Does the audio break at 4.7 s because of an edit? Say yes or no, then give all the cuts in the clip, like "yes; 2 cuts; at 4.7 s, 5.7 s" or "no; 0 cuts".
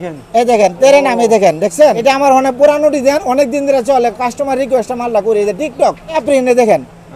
no; 2 cuts; at 2.0 s, 6.2 s